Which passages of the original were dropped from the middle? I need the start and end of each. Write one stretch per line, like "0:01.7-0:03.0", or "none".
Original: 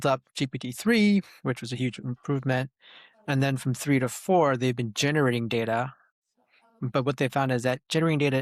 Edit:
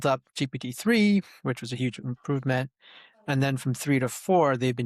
none